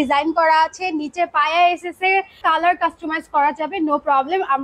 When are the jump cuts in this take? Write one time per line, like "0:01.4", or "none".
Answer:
0:02.4